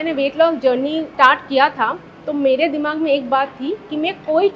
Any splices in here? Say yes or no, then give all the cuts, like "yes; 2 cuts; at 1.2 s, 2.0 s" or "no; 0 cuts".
yes; 1 cut; at 1.1 s